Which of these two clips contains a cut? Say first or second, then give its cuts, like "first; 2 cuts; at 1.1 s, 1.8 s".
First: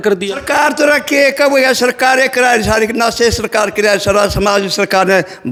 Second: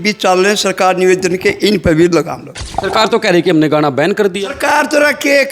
second; 1 cut; at 2.7 s